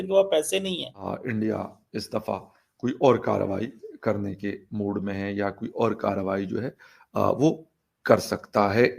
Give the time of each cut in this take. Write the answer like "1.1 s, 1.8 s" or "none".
1.1 s